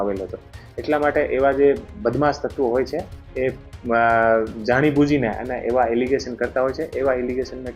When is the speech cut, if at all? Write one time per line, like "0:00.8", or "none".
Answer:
none